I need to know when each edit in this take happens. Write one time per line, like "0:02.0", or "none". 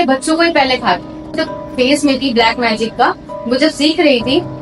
0:01.5